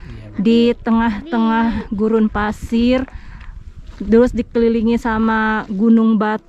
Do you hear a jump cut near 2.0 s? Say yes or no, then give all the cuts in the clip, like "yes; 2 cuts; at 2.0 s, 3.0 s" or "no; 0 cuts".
no; 0 cuts